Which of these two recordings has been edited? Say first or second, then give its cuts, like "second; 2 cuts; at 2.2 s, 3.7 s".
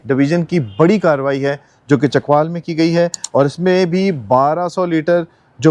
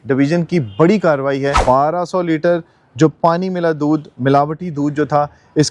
second; 1 cut; at 1.6 s